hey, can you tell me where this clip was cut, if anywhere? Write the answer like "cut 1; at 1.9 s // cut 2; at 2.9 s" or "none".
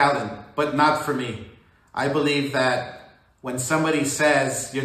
cut 1; at 1.6 s